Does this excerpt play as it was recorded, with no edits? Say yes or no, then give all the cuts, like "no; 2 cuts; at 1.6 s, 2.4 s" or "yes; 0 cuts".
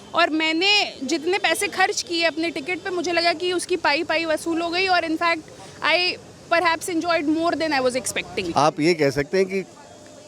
no; 1 cut; at 8.5 s